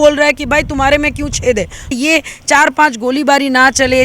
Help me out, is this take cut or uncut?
cut